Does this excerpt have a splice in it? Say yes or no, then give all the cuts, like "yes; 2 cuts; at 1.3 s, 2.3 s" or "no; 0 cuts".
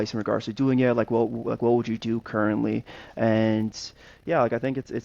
no; 0 cuts